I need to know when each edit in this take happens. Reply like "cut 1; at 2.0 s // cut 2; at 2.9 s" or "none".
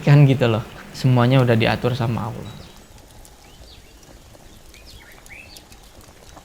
none